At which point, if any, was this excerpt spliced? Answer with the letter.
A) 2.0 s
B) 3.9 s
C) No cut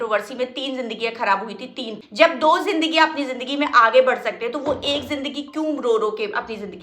A